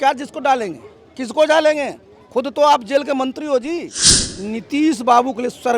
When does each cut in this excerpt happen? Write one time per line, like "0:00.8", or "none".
0:04.2